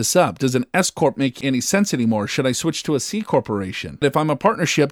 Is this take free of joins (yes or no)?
no